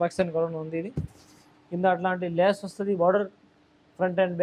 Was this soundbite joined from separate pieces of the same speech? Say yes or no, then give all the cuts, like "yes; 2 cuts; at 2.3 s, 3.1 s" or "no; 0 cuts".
no; 0 cuts